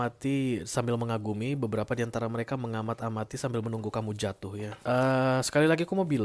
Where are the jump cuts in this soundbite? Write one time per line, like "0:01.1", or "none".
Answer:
0:04.7